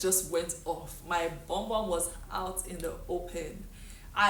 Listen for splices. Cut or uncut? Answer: uncut